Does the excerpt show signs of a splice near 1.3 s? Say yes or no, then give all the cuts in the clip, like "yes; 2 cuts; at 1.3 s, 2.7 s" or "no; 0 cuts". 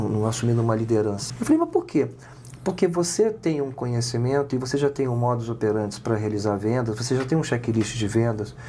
yes; 1 cut; at 1.3 s